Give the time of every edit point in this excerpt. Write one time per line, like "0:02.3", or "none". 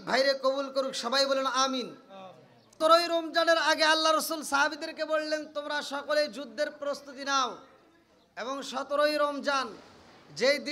0:02.8